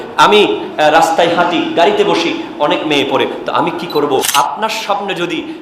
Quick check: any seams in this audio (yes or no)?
yes